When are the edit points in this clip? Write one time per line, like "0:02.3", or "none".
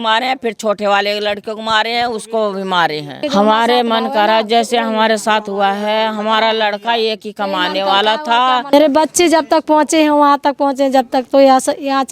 0:03.2
0:08.7